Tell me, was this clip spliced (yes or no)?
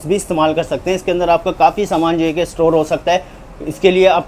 no